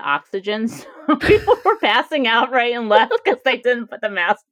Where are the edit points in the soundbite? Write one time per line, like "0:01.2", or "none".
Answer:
0:03.6